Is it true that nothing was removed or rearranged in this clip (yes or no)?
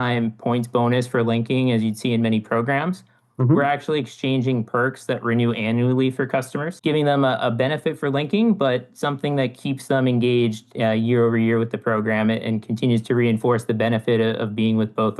no